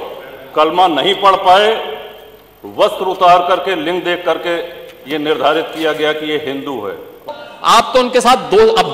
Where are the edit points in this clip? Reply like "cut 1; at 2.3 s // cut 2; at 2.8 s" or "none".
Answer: cut 1; at 7.2 s

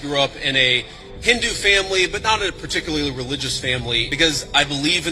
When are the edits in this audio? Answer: cut 1; at 4.1 s

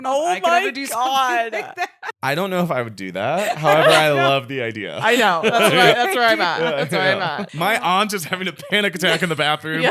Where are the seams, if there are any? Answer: cut 1; at 2.1 s // cut 2; at 7.5 s

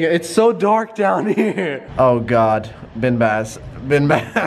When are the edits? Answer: cut 1; at 1.8 s

